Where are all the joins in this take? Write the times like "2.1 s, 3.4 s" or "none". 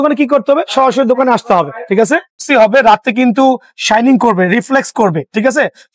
2.5 s